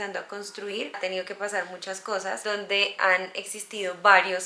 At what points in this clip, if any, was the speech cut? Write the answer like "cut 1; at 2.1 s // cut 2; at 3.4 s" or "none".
cut 1; at 0.9 s